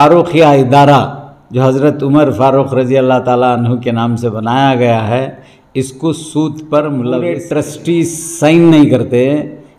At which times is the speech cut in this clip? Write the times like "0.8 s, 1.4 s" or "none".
7.4 s